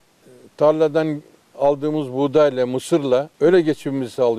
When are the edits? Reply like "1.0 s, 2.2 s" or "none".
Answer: 3.3 s